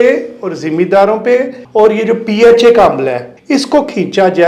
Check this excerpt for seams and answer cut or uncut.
cut